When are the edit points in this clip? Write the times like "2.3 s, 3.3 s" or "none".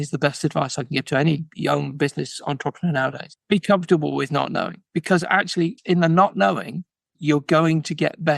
none